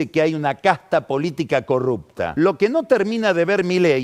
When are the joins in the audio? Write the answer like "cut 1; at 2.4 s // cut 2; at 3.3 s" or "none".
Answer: cut 1; at 2.3 s